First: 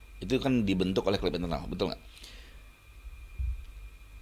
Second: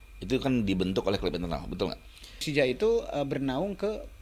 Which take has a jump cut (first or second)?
second